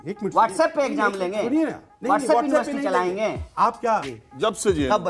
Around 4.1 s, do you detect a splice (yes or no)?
yes